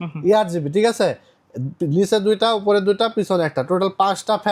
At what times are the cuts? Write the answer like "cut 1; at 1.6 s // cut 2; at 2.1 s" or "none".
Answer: none